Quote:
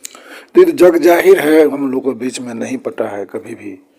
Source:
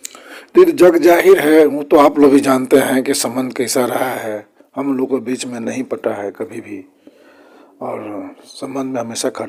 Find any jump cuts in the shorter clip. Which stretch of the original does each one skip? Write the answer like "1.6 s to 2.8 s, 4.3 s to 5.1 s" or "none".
1.8 s to 4.8 s